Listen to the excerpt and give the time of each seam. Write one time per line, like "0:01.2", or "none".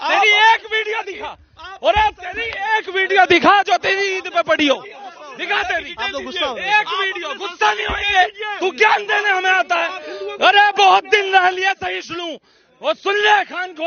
none